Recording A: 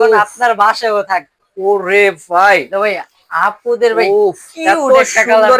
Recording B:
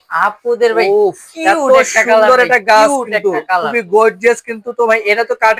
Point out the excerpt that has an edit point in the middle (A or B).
A